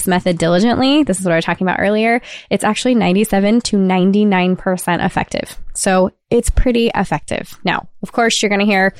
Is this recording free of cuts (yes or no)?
yes